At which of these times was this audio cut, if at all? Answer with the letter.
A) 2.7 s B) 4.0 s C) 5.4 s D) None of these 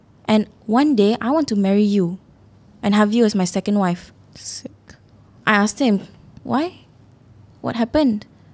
C